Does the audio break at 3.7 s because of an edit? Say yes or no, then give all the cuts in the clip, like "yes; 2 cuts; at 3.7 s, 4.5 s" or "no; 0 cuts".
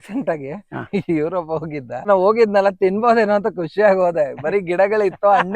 no; 1 cut; at 2.1 s